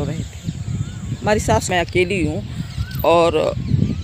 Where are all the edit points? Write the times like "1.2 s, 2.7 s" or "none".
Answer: 1.7 s